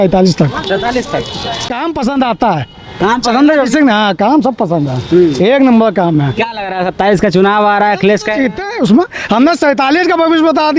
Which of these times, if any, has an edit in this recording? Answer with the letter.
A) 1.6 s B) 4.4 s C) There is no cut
A